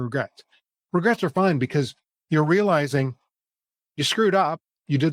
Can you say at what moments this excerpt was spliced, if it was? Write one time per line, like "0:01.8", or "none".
none